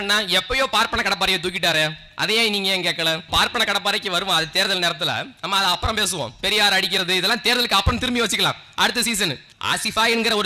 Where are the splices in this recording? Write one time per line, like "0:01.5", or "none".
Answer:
0:03.3
0:09.5